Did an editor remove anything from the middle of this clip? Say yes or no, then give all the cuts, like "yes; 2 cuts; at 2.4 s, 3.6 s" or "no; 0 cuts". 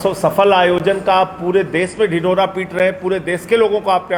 no; 0 cuts